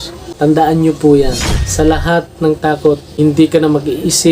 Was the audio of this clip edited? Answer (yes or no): yes